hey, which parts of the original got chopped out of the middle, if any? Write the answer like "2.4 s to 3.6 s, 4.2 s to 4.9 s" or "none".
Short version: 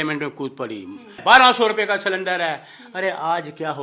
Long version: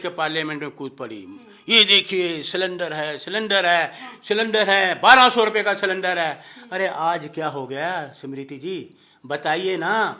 1.6 s to 4.9 s